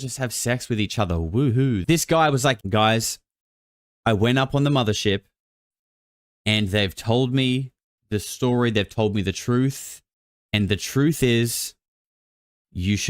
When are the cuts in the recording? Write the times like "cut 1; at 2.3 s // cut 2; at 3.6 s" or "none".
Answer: cut 1; at 1.8 s // cut 2; at 2.6 s